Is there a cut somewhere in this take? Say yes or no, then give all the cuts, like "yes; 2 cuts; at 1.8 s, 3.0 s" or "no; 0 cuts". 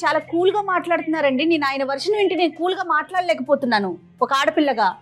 no; 0 cuts